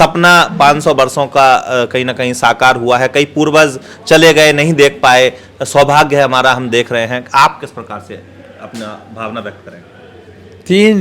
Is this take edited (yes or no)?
no